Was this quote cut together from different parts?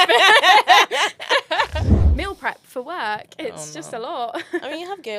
yes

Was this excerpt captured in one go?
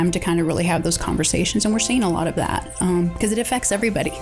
yes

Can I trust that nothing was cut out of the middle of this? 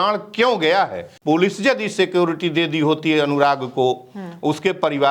no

